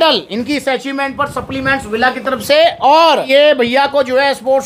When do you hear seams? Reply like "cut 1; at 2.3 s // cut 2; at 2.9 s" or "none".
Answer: none